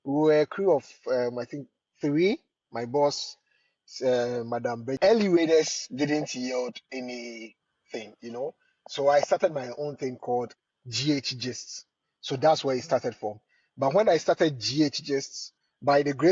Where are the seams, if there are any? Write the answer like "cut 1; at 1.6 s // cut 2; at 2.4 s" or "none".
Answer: cut 1; at 5.0 s

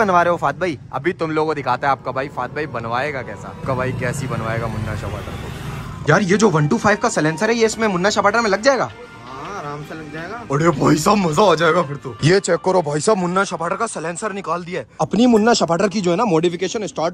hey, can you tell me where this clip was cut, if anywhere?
cut 1; at 5.9 s // cut 2; at 14.9 s

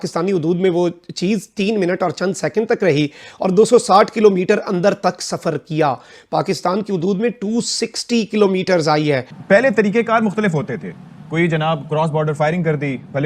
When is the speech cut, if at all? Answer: cut 1; at 9.3 s

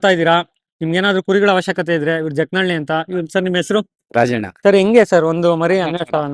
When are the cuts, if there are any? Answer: cut 1; at 4.5 s

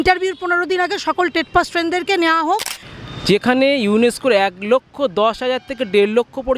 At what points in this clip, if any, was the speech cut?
cut 1; at 2.8 s

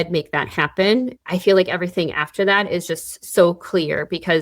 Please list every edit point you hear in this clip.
cut 1; at 1.1 s

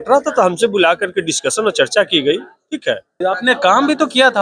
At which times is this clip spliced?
cut 1; at 3.2 s

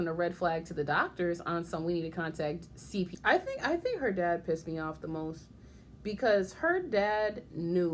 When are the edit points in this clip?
cut 1; at 3.1 s

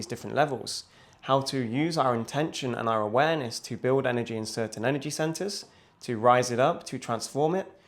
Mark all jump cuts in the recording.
none

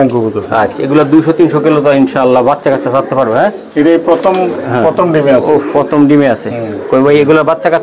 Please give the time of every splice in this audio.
none

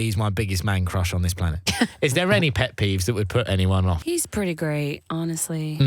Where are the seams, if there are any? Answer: cut 1; at 1.6 s // cut 2; at 4.0 s

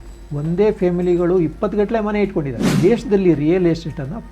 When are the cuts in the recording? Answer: cut 1; at 2.7 s

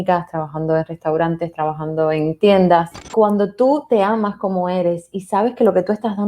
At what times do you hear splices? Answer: cut 1; at 3.0 s

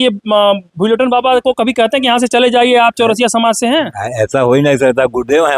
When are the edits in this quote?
none

